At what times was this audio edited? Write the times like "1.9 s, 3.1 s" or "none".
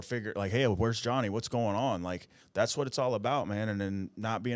2.3 s